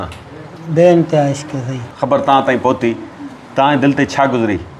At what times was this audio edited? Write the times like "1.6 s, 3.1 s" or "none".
1.9 s